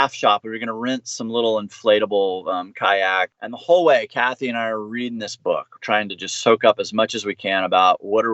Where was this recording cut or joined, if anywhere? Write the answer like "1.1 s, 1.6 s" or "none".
3.4 s